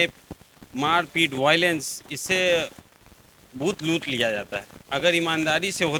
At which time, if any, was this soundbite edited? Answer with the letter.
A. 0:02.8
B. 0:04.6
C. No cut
C